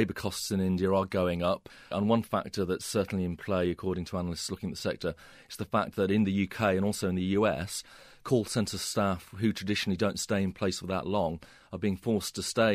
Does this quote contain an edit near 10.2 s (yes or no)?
no